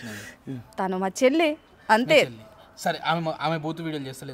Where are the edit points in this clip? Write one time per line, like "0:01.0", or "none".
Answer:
none